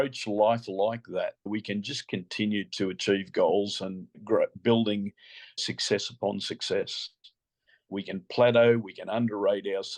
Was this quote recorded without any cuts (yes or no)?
no